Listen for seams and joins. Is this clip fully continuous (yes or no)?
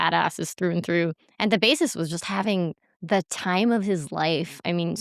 no